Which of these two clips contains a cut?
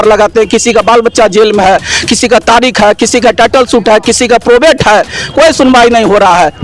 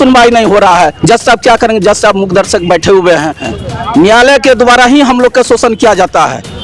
second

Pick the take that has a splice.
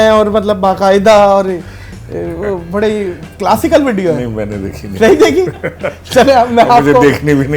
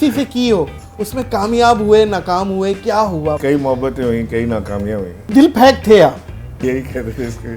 second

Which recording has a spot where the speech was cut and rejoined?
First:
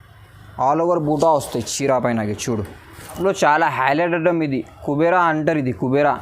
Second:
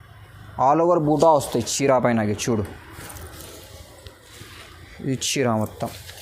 first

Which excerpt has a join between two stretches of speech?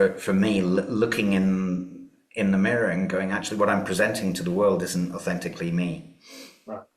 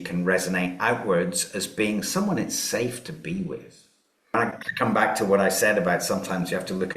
second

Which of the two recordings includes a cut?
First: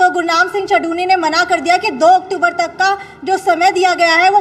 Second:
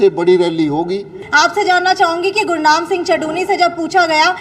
second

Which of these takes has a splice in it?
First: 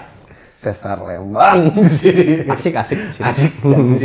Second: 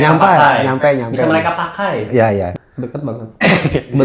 second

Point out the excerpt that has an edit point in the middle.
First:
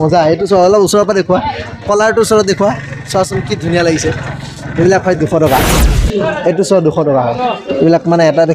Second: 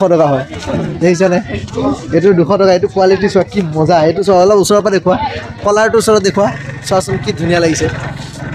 first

